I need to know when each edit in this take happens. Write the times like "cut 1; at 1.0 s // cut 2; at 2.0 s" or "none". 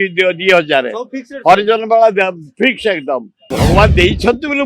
cut 1; at 3.4 s